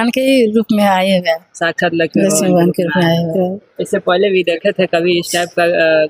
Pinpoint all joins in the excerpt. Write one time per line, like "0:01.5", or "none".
0:03.3

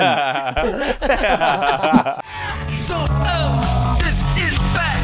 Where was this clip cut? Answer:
0:02.2

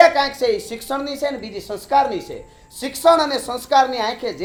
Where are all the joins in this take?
none

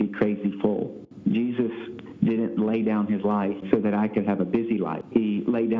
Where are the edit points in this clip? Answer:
0:01.0
0:03.6
0:05.0

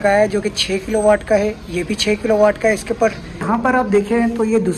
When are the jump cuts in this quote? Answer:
0:03.4

